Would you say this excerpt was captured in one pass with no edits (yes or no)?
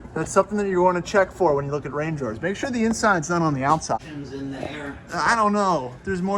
no